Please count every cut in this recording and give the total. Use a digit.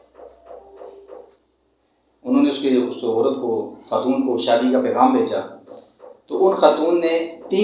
0